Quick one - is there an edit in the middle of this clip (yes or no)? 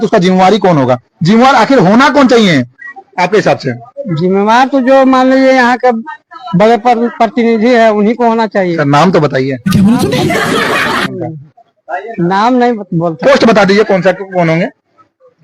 no